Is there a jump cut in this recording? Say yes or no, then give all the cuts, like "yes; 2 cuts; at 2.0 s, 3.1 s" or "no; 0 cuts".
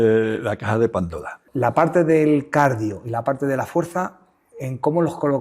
yes; 1 cut; at 1.4 s